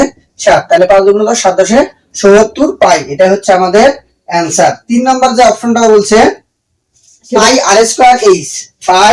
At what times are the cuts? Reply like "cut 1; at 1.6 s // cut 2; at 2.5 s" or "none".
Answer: cut 1; at 7.4 s